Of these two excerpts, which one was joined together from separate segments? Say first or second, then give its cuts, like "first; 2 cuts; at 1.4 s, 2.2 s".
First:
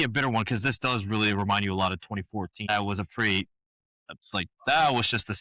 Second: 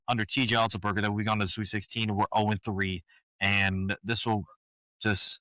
first; 1 cut; at 2.7 s